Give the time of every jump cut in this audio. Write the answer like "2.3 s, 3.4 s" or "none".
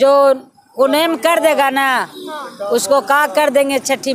none